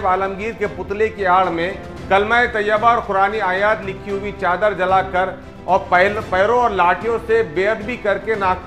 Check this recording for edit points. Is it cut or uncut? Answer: uncut